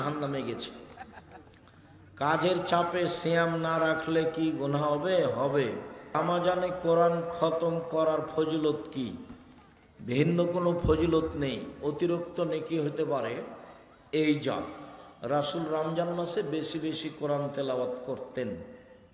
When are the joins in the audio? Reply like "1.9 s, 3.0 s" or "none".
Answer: 6.1 s